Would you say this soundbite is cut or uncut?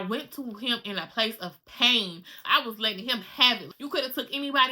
cut